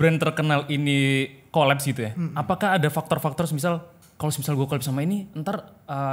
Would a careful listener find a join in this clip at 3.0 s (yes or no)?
no